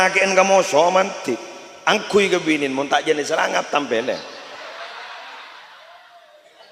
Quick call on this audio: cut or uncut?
uncut